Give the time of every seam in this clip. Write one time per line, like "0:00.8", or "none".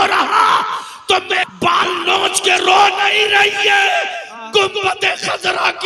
0:01.5